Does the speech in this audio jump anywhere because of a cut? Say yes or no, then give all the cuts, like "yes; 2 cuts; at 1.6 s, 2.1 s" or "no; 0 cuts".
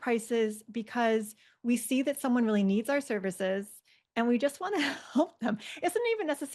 no; 0 cuts